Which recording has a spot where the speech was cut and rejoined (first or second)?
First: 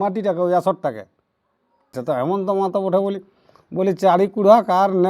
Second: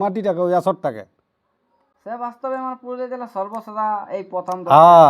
first